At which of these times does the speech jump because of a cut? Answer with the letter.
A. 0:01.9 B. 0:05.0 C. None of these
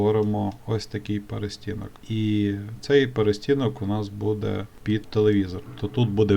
A